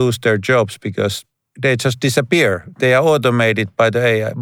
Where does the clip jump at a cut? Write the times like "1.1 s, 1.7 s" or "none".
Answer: 1.6 s, 2.6 s